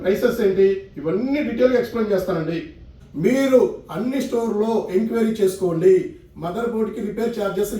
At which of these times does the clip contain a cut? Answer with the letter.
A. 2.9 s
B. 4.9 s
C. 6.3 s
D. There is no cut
A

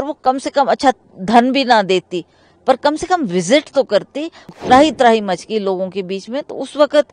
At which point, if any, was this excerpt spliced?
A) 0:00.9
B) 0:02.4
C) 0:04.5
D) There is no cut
C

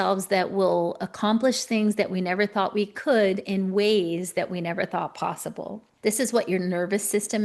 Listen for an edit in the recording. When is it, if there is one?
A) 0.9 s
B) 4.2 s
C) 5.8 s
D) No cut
C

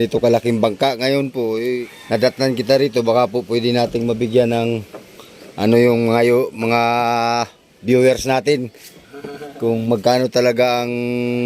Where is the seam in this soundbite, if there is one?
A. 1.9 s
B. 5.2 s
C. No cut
A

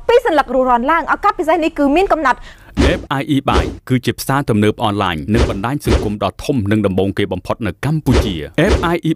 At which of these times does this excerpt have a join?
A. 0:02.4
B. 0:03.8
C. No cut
A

